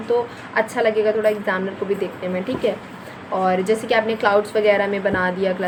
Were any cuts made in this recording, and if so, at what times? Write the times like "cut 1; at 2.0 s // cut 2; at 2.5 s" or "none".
none